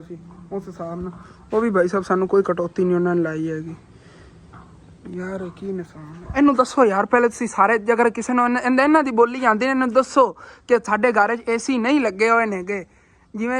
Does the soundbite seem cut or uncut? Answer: uncut